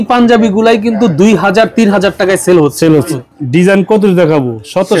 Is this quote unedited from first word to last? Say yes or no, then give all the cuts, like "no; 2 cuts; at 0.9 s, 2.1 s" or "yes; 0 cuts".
no; 1 cut; at 3.2 s